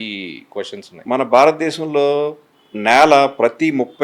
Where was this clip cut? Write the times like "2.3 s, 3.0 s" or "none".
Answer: 0.9 s